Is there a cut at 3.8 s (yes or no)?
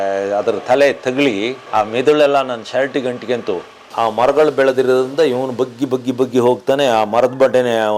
yes